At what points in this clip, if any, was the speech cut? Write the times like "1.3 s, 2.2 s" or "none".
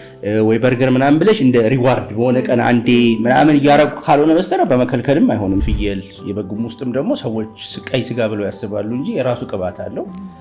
5.6 s